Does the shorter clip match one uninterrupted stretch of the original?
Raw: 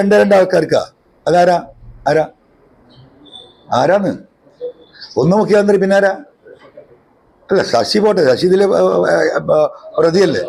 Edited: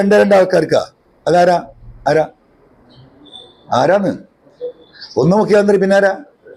yes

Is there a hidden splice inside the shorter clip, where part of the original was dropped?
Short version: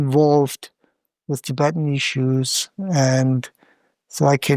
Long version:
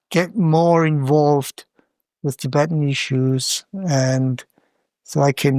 no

